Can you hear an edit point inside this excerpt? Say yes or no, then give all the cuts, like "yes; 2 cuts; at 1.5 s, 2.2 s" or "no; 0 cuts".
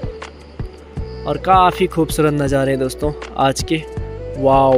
no; 0 cuts